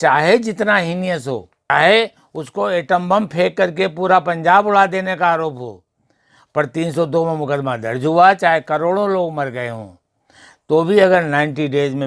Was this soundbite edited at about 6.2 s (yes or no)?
no